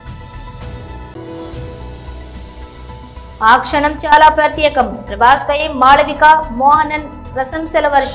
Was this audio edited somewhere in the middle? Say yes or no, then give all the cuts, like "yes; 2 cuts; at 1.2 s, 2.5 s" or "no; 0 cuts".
yes; 2 cuts; at 1.0 s, 2.9 s